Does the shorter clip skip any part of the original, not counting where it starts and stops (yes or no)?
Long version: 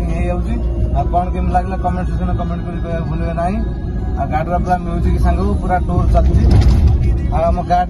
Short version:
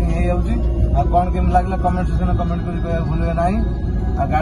no